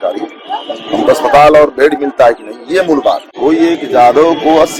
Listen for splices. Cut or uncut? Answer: cut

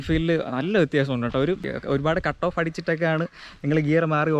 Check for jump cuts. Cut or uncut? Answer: cut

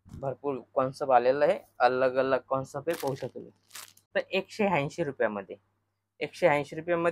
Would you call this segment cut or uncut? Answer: cut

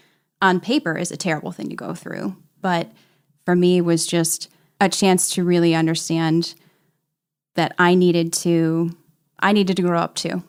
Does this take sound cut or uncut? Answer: uncut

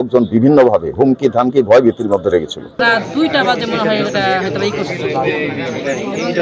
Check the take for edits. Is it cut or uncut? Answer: cut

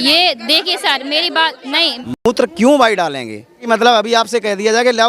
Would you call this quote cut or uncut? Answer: cut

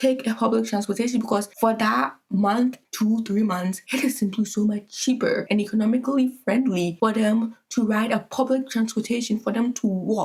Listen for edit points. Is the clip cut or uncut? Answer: uncut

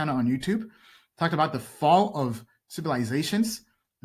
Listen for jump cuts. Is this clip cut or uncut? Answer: uncut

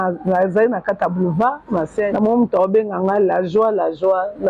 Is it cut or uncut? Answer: cut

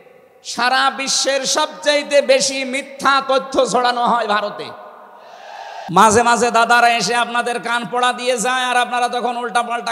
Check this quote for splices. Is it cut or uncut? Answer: cut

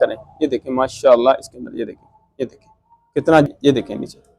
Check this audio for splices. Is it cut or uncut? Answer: cut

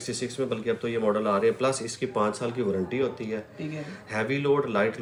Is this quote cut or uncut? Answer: uncut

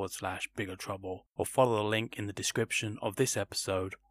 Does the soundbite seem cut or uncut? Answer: cut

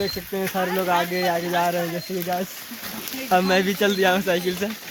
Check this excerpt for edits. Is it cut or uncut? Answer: uncut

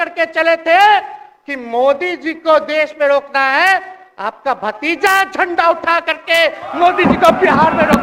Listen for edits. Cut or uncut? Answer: uncut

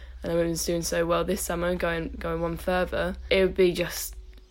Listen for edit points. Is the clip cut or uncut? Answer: cut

